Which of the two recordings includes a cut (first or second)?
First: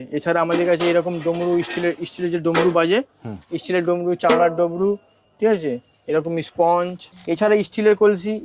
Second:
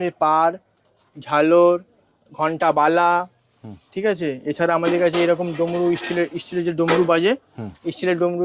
first